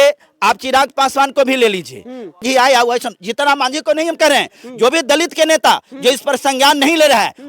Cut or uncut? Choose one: cut